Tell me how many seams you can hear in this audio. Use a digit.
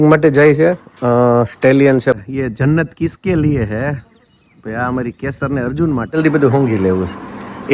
2